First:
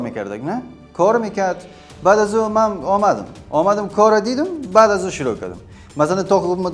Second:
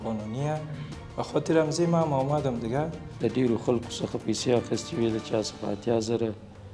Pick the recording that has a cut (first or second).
second